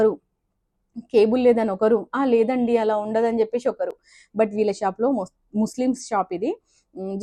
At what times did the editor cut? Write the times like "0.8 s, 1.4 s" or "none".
none